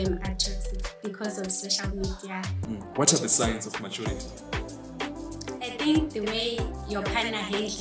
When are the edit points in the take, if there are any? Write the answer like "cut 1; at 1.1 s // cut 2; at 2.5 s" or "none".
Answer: cut 1; at 2.6 s